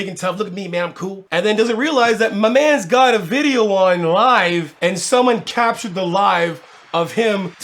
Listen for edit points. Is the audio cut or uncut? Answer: cut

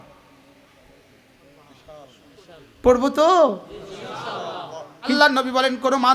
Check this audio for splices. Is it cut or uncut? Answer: cut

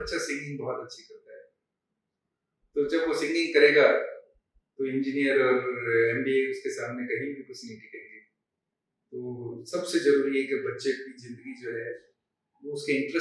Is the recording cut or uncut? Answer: uncut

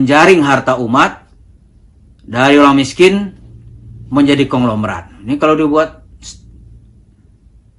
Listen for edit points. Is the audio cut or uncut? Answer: uncut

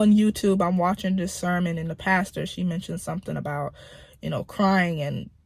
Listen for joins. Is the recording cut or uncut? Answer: uncut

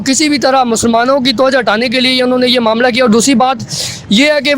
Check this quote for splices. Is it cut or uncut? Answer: uncut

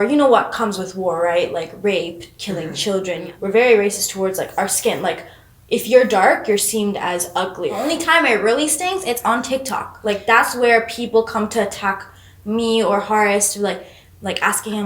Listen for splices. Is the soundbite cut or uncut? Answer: cut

